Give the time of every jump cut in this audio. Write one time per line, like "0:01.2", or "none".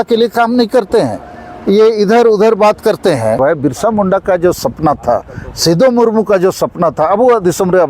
0:03.4